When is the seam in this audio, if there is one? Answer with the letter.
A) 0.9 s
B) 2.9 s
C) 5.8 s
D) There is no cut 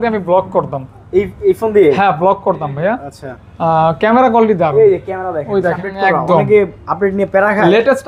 C